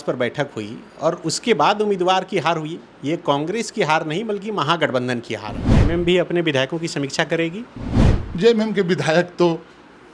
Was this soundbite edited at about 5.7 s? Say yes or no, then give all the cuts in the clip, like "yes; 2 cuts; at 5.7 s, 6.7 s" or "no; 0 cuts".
yes; 1 cut; at 5.7 s